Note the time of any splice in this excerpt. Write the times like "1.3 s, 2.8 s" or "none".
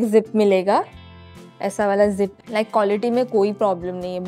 2.4 s